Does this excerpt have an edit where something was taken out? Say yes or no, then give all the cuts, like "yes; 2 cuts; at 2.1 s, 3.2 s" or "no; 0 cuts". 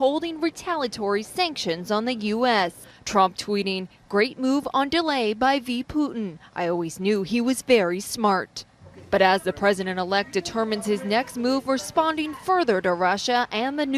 no; 0 cuts